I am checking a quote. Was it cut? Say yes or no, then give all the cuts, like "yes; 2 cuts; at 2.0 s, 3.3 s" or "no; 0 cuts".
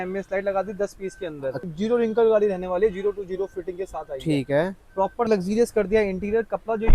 yes; 2 cuts; at 1.6 s, 5.3 s